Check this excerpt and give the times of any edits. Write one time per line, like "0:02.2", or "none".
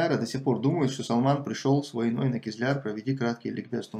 none